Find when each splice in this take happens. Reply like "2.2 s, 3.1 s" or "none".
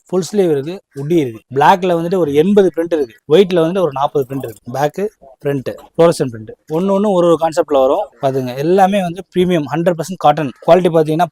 1.4 s, 4.7 s, 8.1 s